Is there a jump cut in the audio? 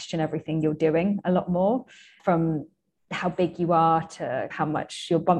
yes; 2 cuts; at 2.2 s, 4.5 s

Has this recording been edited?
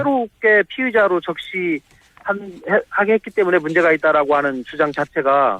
no; 0 cuts

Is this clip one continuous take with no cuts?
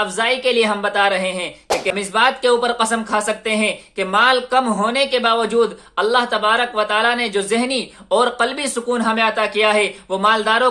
no; 1 cut; at 1.9 s

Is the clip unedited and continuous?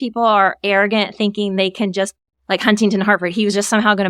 yes; 0 cuts

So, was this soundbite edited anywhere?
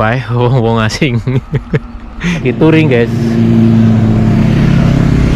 yes; 1 cut; at 2.4 s

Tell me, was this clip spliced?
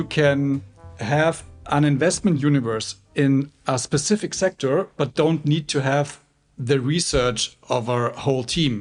no; 0 cuts

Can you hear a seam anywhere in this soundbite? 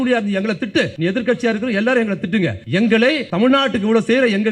yes; 3 cuts; at 0.9 s, 2.6 s, 3.3 s

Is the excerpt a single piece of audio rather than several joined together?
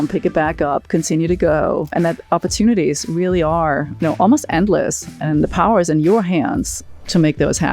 no; 2 cuts; at 1.9 s, 3.9 s

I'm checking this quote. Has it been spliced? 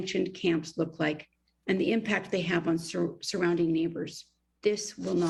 no; 0 cuts

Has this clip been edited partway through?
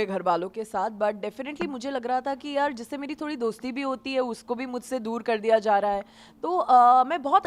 no; 0 cuts

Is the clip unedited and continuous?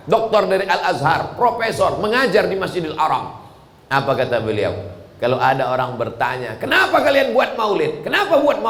yes; 0 cuts

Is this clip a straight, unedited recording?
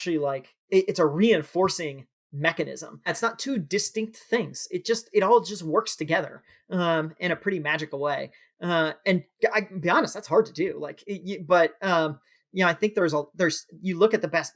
no; 1 cut; at 3.1 s

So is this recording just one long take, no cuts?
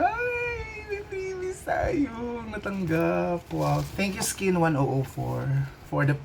yes; 0 cuts

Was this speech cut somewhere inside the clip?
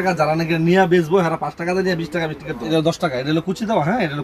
yes; 1 cut; at 2.6 s

